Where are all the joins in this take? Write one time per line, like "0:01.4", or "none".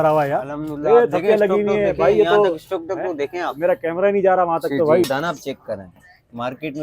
0:05.1